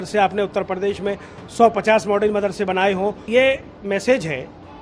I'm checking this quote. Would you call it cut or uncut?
cut